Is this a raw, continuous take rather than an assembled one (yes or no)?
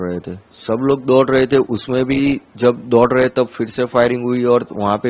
yes